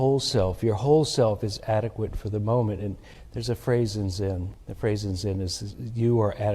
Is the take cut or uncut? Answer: cut